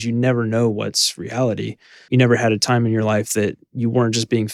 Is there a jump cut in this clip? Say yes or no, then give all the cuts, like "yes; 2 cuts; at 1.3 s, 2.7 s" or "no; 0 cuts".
no; 0 cuts